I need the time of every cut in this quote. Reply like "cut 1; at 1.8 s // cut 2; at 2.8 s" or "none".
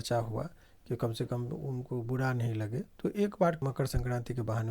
cut 1; at 2.9 s // cut 2; at 3.6 s